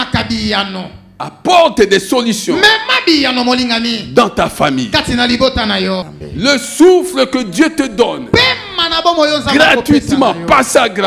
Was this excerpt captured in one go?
no; 1 cut; at 6.1 s

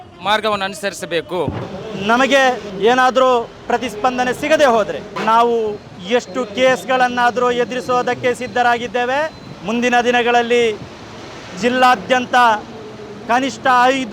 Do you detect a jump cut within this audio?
yes; 2 cuts; at 1.6 s, 2.7 s

